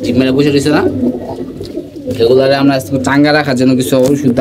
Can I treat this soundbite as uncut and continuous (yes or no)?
yes